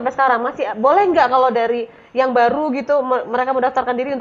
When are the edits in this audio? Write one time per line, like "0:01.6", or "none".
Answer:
none